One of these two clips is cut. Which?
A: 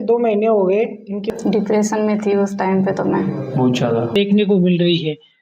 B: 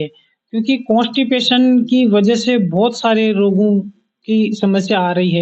A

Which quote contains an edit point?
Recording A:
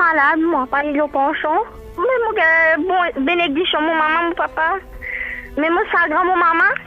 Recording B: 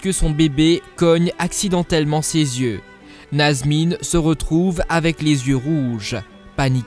B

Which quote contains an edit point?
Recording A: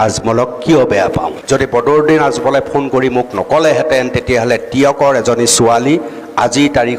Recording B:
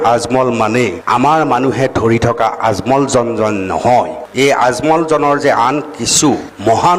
A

